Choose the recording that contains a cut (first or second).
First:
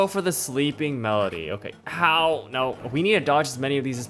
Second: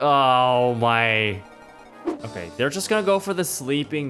second